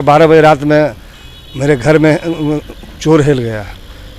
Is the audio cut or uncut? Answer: uncut